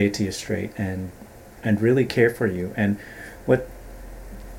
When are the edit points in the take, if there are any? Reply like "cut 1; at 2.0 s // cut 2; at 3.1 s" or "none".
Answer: none